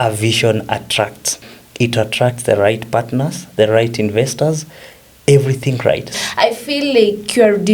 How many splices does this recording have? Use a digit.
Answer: 2